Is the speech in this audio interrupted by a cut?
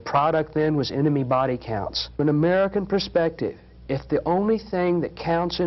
yes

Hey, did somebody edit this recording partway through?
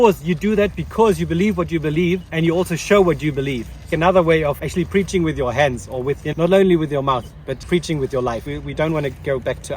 yes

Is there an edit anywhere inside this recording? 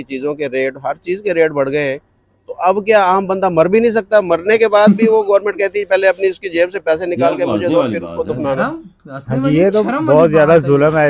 no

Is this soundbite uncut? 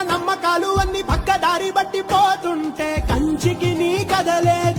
yes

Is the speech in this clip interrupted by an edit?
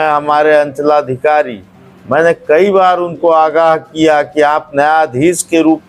no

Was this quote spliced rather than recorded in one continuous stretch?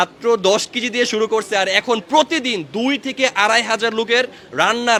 no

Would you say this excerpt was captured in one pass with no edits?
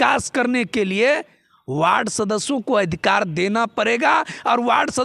yes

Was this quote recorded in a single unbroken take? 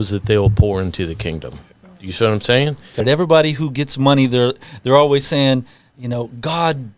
no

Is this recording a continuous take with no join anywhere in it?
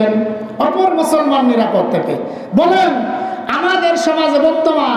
yes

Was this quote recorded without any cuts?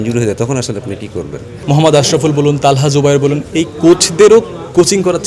no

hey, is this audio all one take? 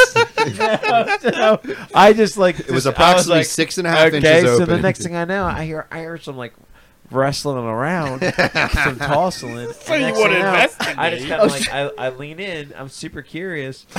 yes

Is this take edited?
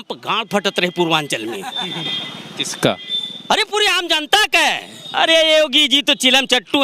yes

